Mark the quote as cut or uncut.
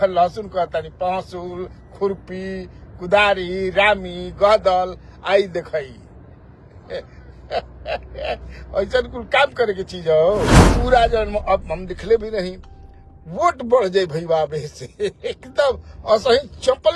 cut